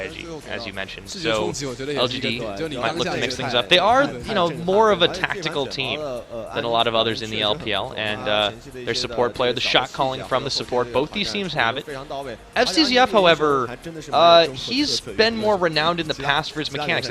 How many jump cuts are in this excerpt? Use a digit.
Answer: 1